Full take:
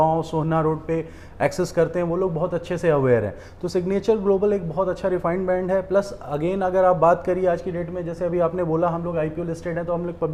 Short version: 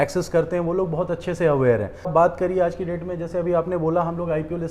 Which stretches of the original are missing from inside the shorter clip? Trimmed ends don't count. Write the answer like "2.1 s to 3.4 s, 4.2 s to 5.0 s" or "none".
3.5 s to 7.0 s